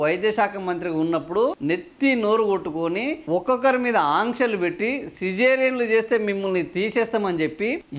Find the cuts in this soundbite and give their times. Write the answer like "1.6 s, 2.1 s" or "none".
1.6 s, 3.2 s